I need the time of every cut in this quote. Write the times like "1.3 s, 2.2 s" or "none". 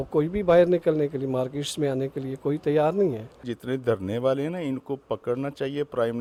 none